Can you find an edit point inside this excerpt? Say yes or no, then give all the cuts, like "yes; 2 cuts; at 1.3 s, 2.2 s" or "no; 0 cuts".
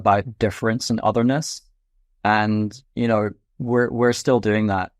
no; 0 cuts